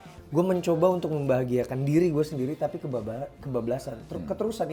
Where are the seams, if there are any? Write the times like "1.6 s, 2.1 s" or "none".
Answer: none